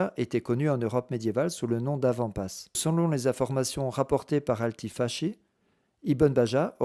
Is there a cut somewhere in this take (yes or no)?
yes